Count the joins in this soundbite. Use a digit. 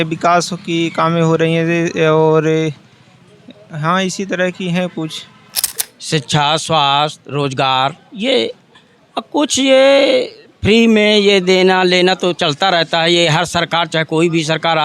1